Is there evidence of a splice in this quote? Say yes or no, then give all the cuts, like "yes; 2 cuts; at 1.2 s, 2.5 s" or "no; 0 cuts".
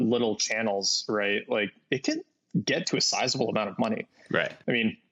no; 0 cuts